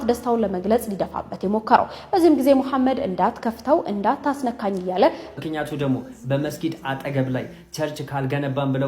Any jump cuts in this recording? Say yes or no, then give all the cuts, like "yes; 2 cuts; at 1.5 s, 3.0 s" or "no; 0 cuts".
yes; 1 cut; at 5.2 s